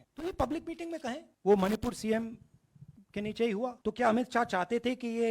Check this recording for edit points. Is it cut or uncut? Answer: cut